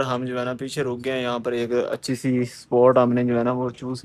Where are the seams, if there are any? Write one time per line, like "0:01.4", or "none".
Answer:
none